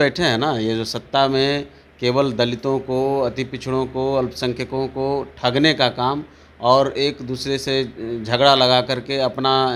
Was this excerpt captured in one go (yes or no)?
yes